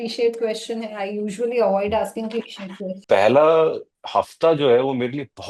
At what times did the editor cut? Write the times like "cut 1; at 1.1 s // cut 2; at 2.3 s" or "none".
cut 1; at 2.9 s